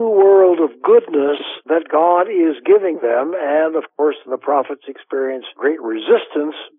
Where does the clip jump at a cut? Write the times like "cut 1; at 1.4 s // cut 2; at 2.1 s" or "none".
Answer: cut 1; at 1.5 s